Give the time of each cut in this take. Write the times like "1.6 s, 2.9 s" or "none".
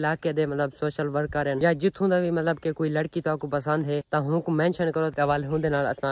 5.1 s